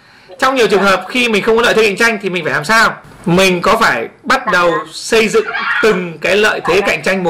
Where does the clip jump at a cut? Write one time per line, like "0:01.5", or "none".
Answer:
0:03.1